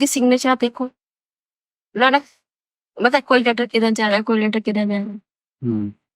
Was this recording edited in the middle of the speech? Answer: no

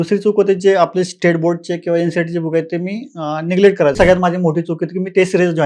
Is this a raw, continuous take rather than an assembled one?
no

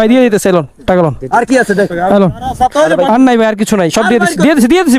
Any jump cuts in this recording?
no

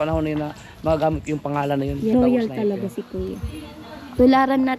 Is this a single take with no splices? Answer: no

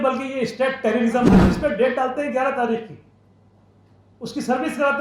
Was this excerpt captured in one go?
no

